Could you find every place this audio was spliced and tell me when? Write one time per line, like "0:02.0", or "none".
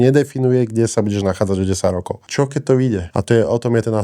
0:02.3
0:03.1